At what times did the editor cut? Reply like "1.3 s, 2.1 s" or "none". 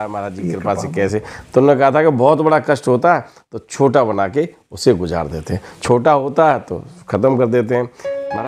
none

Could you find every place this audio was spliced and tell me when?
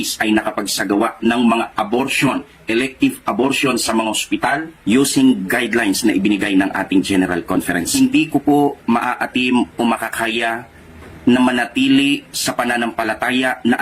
2.6 s, 7.9 s, 11.9 s

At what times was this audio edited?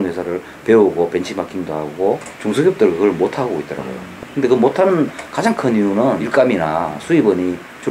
2.3 s, 6.2 s

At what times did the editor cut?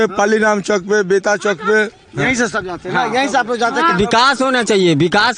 3.9 s

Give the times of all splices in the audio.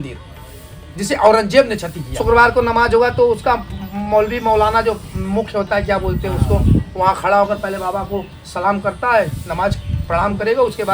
2.0 s

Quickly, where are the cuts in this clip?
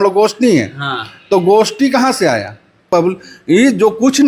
2.9 s

